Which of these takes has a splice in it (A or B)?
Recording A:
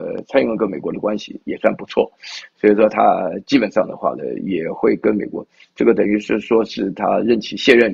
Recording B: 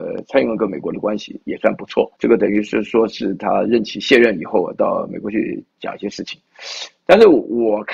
B